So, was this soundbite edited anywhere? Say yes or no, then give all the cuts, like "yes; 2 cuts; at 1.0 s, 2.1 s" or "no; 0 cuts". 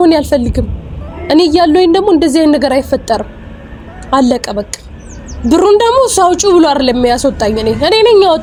no; 0 cuts